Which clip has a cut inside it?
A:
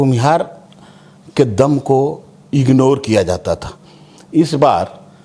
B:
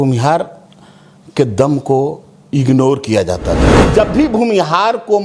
B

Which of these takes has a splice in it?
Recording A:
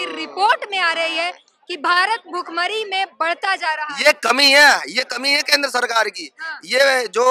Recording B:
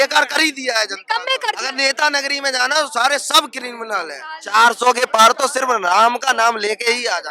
B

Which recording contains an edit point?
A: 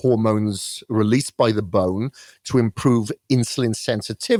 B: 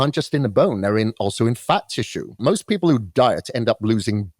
B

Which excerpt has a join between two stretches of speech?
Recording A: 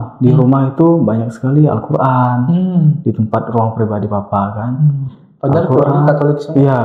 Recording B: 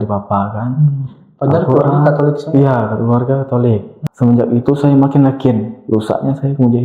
B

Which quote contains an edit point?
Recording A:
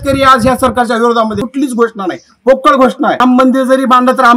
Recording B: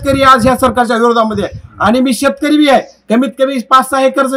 A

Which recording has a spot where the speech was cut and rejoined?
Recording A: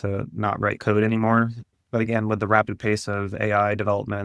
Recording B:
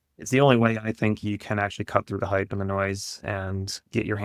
A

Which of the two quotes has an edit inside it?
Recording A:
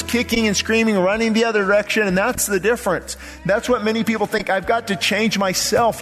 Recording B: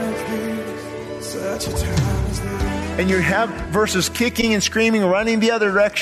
B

